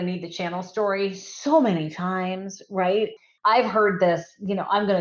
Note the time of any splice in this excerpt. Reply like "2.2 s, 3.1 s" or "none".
3.2 s